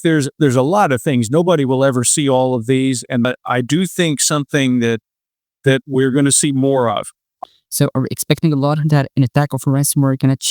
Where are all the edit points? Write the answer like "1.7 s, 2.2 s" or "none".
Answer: 3.2 s, 7.3 s